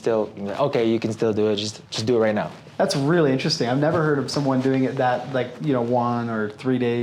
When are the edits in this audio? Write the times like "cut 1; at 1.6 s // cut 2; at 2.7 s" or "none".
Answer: cut 1; at 2.6 s